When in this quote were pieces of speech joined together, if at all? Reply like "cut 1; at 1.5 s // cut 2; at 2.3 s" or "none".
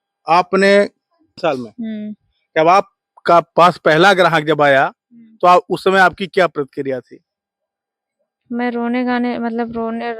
cut 1; at 1.4 s